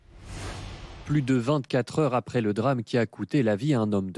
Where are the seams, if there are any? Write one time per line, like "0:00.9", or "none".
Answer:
none